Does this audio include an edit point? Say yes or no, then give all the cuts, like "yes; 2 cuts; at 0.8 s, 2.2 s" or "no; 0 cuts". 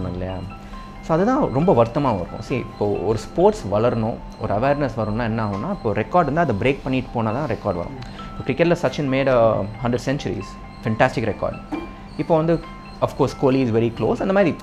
no; 0 cuts